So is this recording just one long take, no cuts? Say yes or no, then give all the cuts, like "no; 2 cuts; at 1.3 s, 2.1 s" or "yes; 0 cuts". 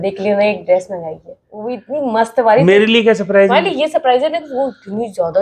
no; 1 cut; at 1.5 s